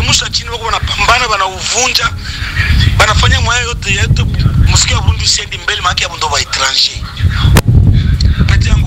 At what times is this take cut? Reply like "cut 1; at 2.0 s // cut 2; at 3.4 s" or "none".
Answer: none